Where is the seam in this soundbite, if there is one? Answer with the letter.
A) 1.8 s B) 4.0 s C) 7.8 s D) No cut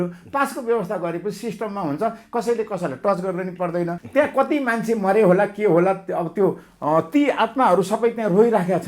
B